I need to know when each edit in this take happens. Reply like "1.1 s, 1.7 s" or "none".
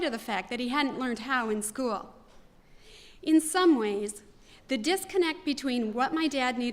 3.9 s